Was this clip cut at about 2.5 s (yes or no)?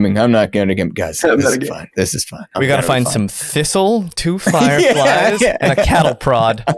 yes